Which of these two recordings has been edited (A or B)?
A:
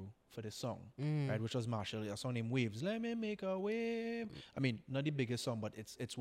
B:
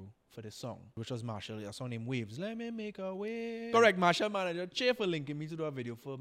B